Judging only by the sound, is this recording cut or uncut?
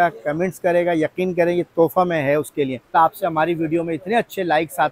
cut